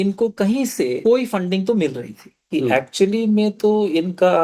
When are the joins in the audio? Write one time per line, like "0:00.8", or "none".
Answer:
0:01.0
0:02.4